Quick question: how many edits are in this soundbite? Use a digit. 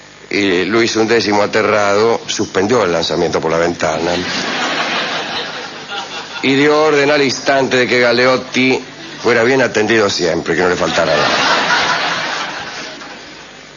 1